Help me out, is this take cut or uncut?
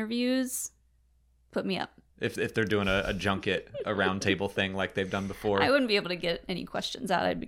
cut